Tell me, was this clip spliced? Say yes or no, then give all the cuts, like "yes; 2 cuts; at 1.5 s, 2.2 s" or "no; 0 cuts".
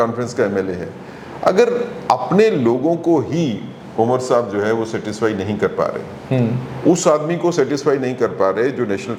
no; 0 cuts